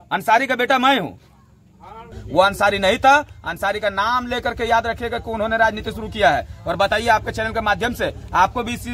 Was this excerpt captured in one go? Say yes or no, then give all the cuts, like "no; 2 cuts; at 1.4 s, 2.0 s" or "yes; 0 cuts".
no; 1 cut; at 2.2 s